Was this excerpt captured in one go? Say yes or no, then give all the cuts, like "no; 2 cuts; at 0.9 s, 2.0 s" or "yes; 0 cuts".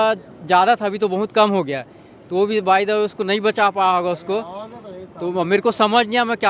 yes; 0 cuts